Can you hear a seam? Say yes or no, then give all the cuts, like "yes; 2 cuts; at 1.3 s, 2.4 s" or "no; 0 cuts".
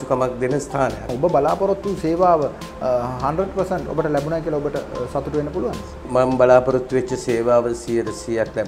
yes; 2 cuts; at 1.1 s, 6.0 s